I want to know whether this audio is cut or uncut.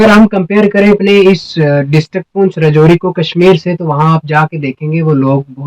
cut